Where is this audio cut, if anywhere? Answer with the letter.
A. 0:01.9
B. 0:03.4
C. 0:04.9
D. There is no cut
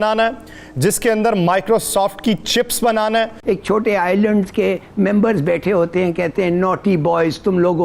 B